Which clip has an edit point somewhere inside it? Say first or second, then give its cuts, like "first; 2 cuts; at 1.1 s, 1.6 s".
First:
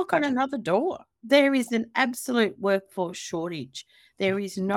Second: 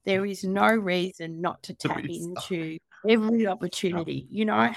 first; 1 cut; at 1.1 s